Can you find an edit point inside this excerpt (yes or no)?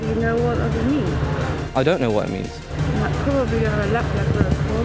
no